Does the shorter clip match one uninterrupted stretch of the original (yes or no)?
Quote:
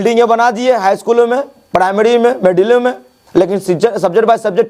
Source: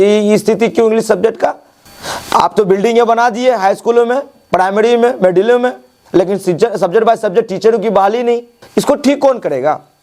yes